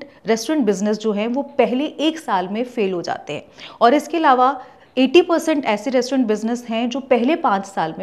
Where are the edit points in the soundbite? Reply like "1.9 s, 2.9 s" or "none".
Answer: none